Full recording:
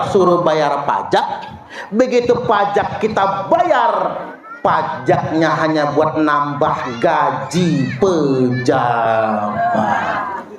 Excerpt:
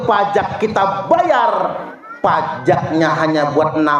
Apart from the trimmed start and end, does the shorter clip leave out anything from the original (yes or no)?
no